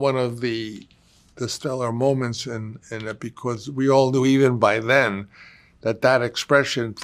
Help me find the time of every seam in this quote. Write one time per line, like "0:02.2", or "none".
none